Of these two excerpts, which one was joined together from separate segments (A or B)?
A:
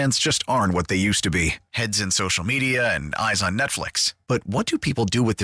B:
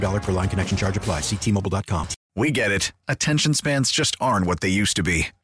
B